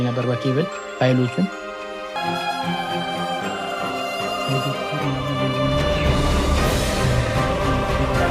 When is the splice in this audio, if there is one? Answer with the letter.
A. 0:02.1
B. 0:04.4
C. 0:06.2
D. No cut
A